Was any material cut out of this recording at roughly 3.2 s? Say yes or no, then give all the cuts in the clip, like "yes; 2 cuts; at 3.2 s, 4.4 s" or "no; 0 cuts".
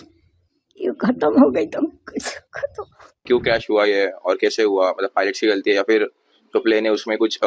yes; 1 cut; at 3.2 s